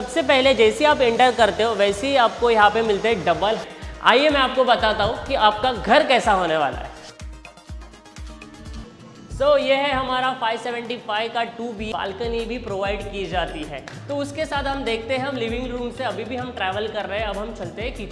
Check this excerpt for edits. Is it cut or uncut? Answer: cut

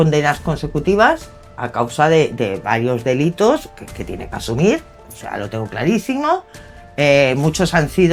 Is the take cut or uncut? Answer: uncut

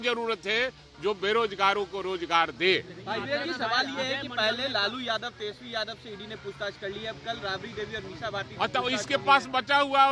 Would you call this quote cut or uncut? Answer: uncut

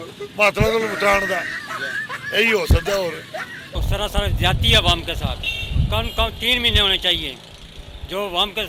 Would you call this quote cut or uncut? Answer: uncut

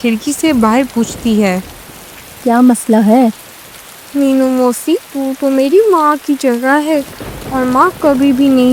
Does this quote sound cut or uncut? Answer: uncut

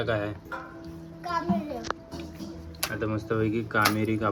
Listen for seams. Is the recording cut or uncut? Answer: uncut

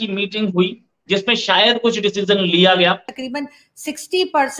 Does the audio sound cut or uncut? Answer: cut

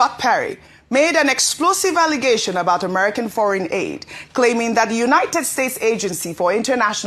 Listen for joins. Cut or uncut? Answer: uncut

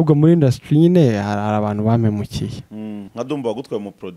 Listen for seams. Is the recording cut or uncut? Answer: cut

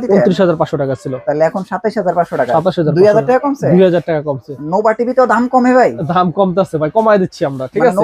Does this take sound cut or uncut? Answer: uncut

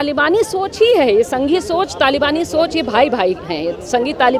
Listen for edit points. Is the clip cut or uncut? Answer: uncut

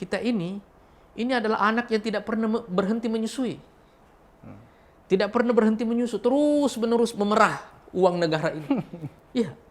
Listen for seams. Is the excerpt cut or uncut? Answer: uncut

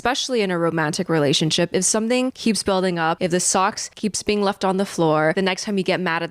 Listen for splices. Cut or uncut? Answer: cut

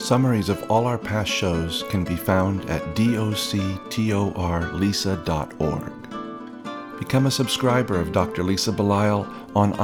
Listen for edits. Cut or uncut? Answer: uncut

